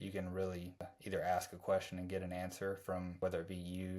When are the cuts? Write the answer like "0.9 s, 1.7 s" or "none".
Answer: 0.9 s, 3.1 s